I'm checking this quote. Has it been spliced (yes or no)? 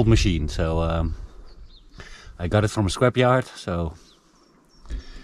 no